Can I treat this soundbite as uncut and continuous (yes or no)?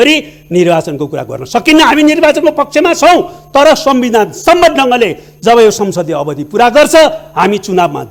yes